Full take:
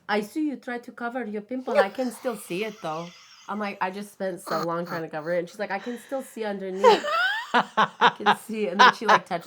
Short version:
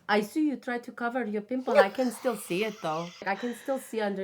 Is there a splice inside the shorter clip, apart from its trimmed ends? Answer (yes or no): yes